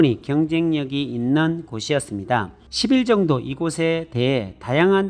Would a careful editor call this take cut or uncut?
uncut